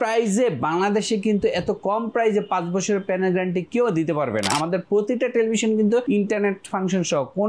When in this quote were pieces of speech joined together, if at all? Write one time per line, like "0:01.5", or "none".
0:04.5
0:06.0